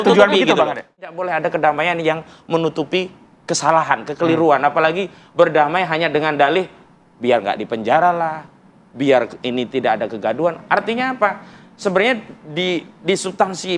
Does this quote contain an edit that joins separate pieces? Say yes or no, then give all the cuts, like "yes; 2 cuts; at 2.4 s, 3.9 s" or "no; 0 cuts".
yes; 1 cut; at 0.9 s